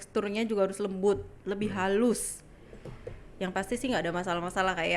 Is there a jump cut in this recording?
no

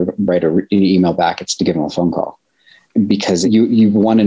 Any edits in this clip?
yes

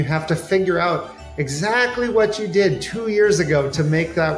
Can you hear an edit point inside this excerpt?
no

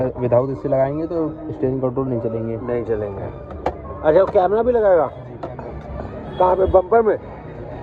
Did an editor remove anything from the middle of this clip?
no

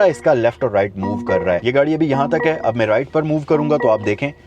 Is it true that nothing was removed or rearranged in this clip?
no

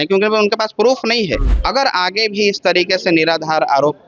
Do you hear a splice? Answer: yes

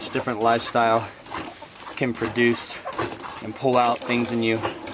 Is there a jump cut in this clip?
no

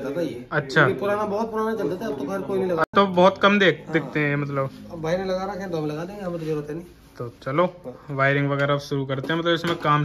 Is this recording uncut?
yes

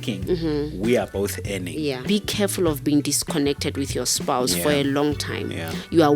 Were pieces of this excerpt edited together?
yes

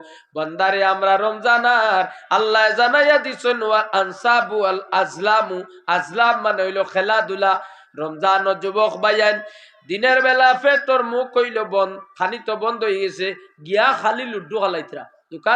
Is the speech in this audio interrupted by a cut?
no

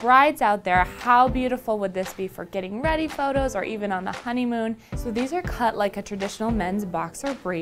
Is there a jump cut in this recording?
yes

